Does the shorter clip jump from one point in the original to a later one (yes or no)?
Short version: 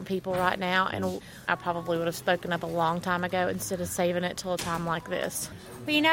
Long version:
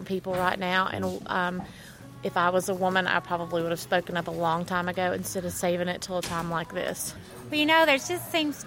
yes